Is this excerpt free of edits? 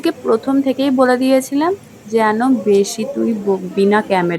yes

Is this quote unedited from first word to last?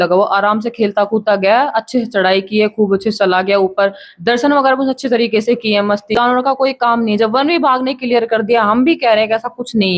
no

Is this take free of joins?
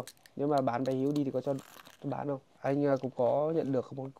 no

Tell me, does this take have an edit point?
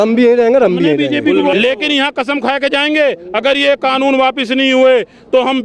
yes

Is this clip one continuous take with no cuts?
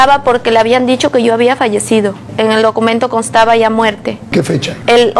no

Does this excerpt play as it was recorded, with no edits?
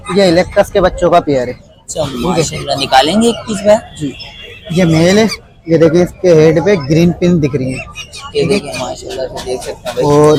yes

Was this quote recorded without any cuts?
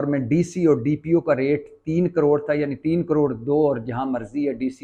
yes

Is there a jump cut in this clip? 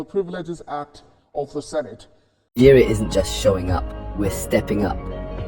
yes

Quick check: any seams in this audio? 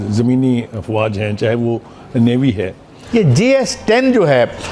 yes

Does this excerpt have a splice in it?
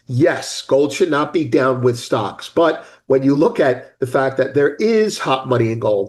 no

